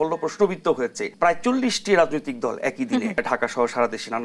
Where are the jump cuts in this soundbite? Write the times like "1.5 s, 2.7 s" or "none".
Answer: 1.0 s, 3.2 s

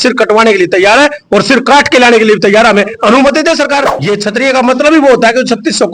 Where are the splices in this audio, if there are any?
3.9 s

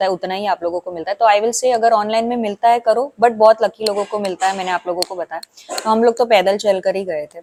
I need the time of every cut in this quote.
none

